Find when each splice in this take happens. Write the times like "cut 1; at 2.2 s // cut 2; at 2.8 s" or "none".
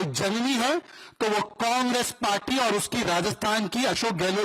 none